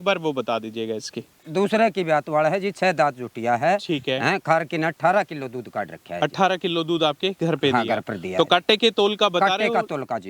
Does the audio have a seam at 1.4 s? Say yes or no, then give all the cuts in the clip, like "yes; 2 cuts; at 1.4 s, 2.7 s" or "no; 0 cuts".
yes; 1 cut; at 1.4 s